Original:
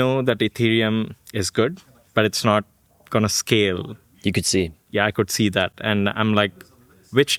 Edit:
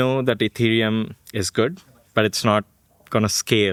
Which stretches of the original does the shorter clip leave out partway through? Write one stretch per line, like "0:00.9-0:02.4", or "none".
none